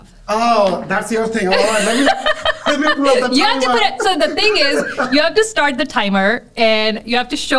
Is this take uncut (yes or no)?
yes